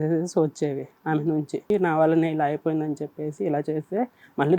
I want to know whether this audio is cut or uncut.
cut